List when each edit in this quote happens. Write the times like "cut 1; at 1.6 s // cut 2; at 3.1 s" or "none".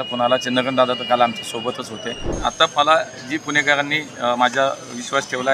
cut 1; at 2.3 s